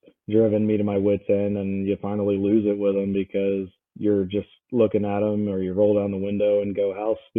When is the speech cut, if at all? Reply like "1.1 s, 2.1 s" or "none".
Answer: none